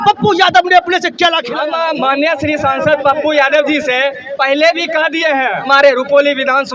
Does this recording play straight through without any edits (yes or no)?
no